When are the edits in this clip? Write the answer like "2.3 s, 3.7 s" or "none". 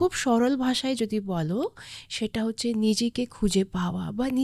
none